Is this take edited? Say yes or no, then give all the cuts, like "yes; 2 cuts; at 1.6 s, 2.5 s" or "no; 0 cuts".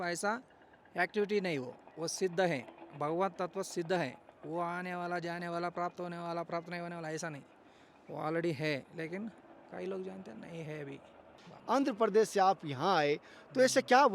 yes; 1 cut; at 11.6 s